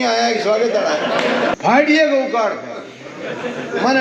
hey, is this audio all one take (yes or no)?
no